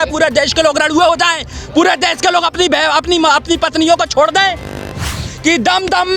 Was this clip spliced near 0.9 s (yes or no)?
no